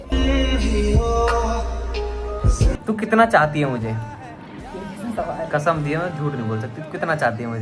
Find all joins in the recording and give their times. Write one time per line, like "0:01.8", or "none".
0:02.8